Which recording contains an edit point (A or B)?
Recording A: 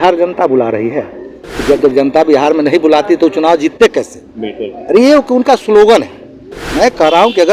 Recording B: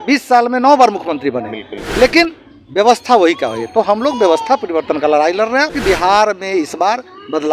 B